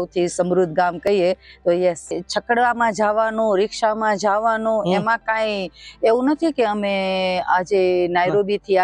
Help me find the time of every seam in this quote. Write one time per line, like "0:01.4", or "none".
0:02.2